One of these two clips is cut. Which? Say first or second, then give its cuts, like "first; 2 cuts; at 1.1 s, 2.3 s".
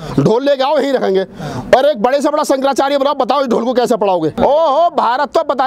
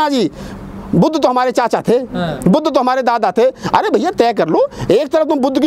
first; 1 cut; at 4.4 s